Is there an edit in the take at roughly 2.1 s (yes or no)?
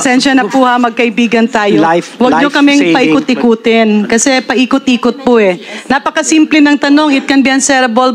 no